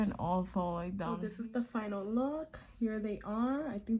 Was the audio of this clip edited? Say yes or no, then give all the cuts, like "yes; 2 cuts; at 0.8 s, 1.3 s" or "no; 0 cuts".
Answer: yes; 1 cut; at 1.2 s